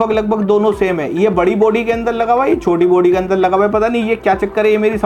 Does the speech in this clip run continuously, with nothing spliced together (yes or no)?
yes